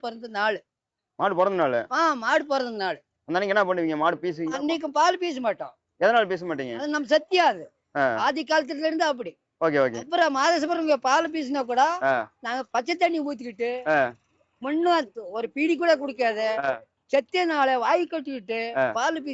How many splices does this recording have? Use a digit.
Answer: 0